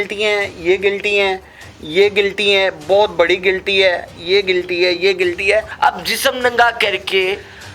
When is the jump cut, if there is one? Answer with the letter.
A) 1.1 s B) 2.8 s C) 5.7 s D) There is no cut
C